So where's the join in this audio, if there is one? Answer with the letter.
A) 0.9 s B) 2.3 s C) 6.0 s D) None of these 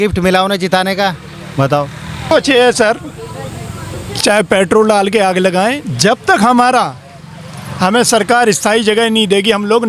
B